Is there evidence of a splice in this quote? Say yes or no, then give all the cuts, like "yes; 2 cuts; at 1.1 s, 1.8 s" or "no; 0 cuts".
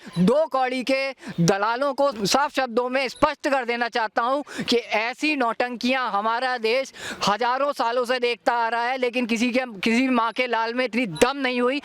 yes; 1 cut; at 2.2 s